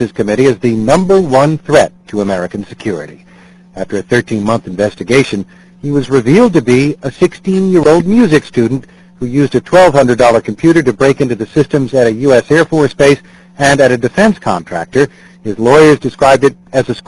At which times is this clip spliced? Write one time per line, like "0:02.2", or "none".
none